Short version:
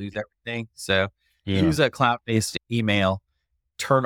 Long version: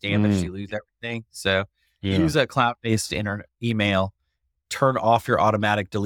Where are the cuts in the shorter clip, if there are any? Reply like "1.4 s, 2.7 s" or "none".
2.5 s